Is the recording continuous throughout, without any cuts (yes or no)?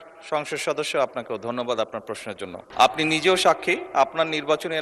no